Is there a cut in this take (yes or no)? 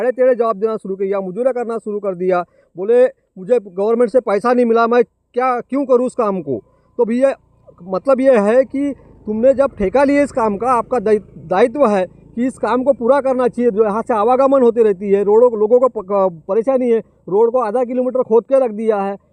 no